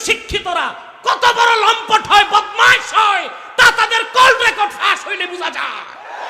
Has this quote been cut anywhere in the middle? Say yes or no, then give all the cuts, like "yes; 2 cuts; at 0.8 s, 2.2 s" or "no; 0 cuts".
no; 0 cuts